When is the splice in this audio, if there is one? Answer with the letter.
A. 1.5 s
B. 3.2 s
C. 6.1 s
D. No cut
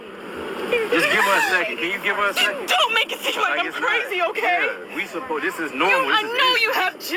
B